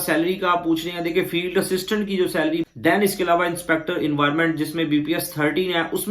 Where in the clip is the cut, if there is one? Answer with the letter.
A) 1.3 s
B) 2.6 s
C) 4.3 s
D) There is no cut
B